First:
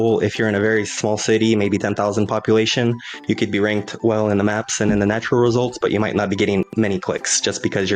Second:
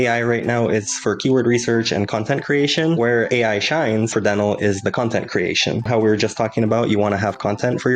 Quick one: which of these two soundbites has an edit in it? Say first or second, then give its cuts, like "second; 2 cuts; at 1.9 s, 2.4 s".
second; 3 cuts; at 3.1 s, 4.1 s, 5.9 s